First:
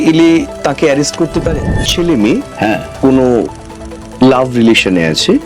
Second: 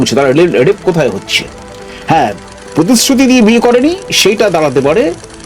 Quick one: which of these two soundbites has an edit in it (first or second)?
first